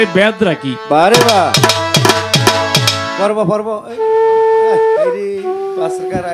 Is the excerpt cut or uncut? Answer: uncut